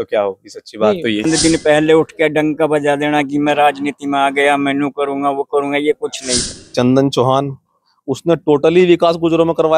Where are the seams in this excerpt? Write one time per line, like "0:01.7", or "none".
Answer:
0:01.2
0:06.3